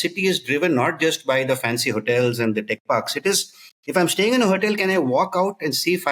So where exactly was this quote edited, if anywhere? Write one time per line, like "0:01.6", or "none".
none